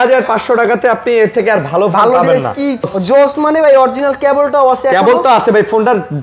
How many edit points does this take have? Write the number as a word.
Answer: one